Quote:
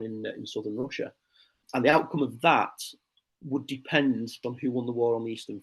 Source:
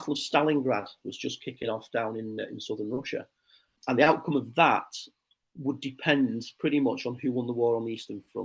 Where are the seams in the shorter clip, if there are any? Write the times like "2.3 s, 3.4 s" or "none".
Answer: 4.4 s